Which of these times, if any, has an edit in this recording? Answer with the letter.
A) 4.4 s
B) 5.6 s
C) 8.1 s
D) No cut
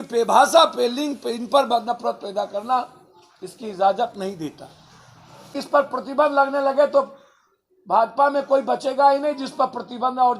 B